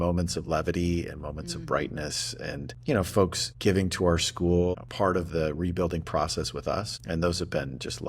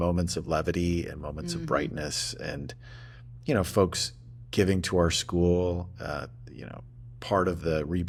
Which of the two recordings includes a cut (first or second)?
first